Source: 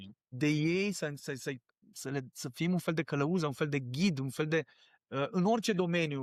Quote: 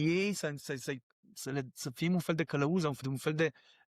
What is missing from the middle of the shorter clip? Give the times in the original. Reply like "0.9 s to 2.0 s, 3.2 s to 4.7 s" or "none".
3.6 s to 4.1 s